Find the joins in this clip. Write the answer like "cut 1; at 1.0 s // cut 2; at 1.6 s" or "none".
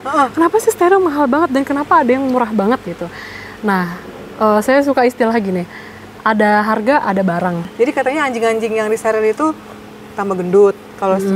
cut 1; at 7.7 s